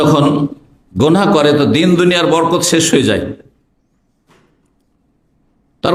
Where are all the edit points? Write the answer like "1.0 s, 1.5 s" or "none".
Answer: none